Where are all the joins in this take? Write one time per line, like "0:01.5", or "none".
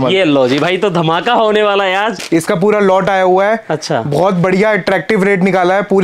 0:02.2